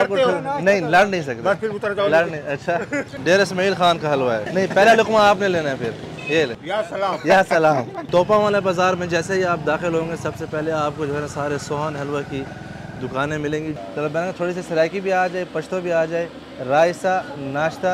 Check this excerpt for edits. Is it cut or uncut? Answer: cut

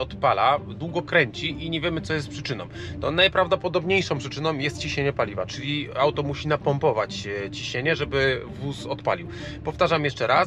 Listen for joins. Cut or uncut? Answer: uncut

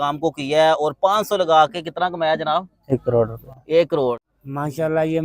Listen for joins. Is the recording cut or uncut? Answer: cut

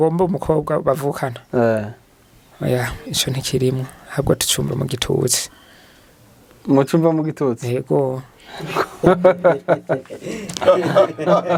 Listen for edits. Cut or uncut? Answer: uncut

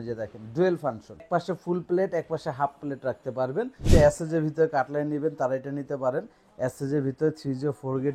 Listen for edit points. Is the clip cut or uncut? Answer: cut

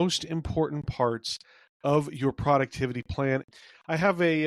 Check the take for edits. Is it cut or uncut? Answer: cut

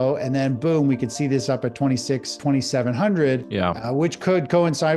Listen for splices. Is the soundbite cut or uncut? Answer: cut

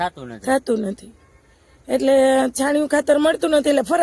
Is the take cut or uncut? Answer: uncut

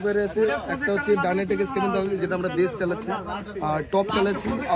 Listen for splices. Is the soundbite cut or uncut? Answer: uncut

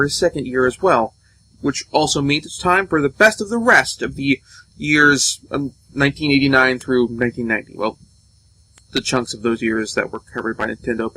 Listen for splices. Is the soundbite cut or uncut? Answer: cut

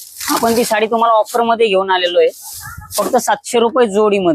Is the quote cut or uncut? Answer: uncut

